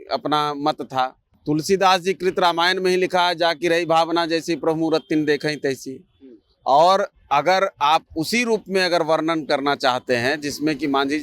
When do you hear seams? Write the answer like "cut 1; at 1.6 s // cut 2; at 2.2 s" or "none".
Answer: cut 1; at 1.3 s